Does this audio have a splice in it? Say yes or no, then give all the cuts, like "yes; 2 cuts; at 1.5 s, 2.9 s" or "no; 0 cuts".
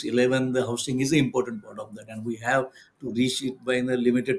no; 0 cuts